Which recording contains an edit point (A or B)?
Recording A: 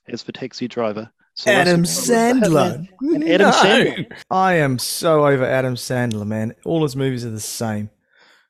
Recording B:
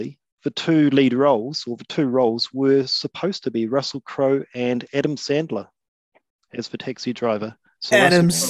A